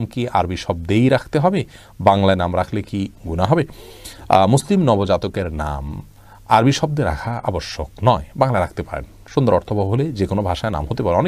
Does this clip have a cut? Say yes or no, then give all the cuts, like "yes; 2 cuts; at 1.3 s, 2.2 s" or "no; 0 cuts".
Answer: no; 0 cuts